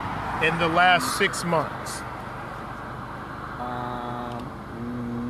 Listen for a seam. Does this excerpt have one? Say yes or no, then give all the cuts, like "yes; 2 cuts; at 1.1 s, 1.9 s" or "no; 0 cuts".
no; 0 cuts